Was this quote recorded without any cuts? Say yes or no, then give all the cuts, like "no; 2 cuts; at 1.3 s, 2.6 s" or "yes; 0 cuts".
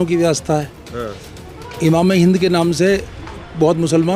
yes; 0 cuts